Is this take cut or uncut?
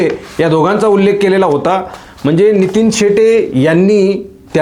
uncut